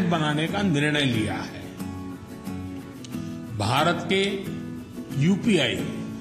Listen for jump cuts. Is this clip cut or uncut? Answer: uncut